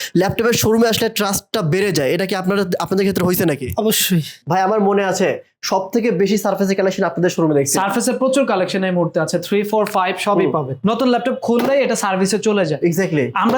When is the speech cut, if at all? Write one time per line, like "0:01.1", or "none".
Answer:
0:04.4
0:10.8